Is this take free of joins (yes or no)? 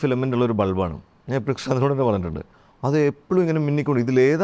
yes